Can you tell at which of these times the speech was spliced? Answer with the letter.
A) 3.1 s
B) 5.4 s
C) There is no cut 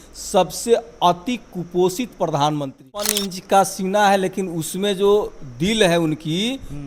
A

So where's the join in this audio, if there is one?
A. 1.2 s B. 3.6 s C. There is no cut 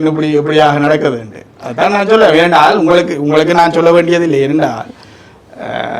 C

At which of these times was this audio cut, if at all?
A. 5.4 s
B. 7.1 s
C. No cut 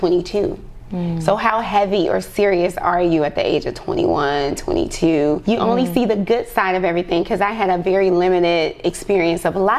A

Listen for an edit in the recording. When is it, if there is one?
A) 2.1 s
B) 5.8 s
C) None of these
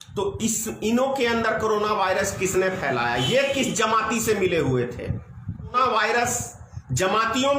B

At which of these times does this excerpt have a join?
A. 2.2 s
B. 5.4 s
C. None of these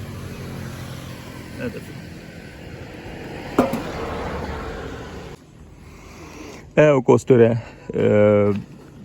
B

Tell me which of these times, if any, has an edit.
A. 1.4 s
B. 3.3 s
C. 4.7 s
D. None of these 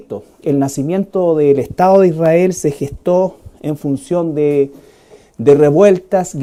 D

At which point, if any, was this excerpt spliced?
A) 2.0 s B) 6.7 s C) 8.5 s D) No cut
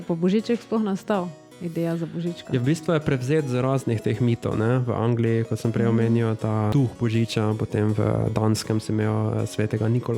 B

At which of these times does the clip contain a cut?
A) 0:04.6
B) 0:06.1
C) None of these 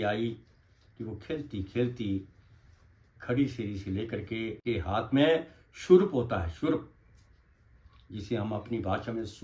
A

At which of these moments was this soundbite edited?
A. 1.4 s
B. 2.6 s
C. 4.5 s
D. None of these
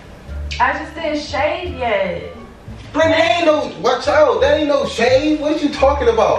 D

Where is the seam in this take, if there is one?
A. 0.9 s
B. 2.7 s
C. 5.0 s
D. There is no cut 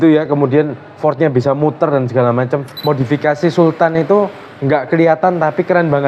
B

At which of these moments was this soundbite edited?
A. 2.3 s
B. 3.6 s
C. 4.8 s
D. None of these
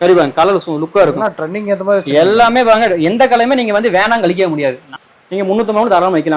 C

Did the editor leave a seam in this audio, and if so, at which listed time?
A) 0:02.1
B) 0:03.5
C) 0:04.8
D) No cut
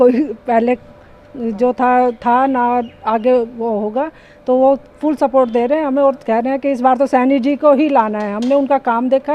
D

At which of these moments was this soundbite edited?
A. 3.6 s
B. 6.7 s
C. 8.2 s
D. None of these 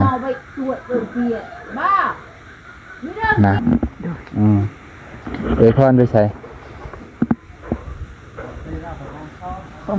A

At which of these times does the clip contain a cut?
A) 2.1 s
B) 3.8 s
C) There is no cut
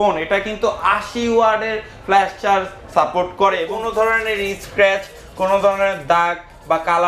B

